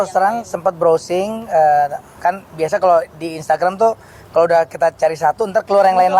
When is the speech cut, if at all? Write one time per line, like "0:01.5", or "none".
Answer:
none

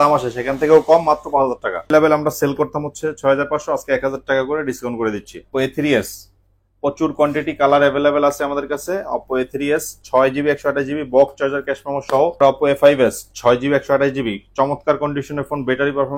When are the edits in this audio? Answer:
0:01.9
0:05.4
0:12.4

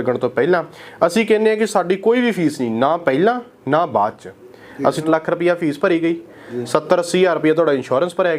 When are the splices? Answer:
0:05.0

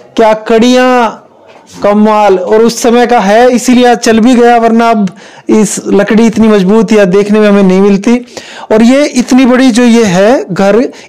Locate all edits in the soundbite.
none

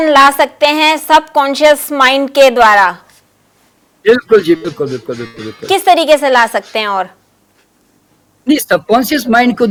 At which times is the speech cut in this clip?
none

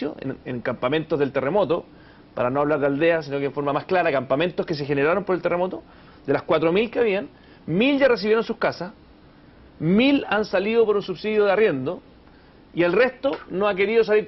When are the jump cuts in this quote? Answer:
none

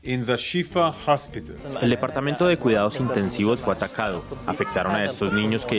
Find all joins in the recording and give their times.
0:01.6

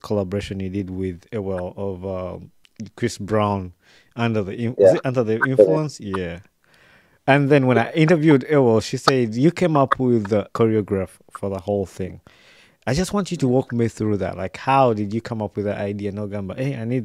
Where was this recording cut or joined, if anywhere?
0:10.5

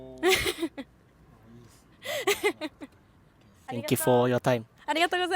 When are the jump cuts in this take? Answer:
none

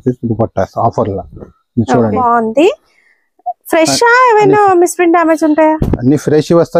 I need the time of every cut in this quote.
0:02.2

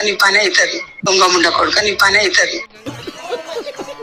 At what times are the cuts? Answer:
none

